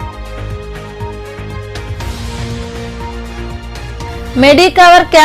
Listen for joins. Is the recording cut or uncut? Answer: cut